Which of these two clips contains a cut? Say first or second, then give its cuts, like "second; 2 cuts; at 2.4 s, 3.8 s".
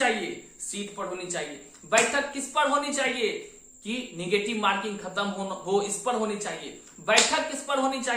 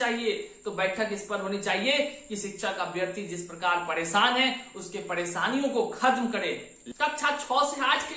second; 1 cut; at 6.8 s